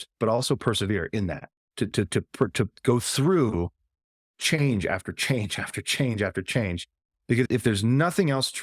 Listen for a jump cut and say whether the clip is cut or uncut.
cut